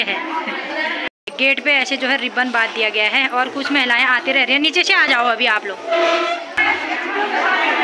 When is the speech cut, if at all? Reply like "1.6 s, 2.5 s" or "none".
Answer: 1.2 s, 6.7 s